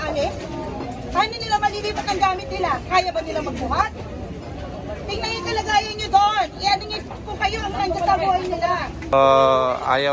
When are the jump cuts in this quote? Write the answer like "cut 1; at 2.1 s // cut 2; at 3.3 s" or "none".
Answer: cut 1; at 9.1 s

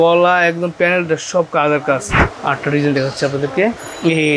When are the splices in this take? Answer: cut 1; at 2.1 s

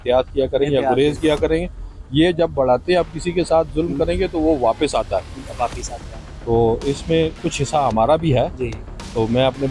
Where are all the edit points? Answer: none

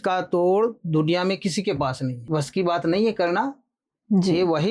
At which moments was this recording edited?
cut 1; at 2.2 s

